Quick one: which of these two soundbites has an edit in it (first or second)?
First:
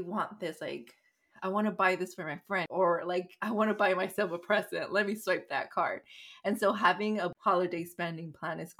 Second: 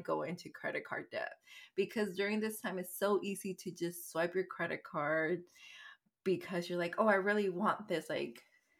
first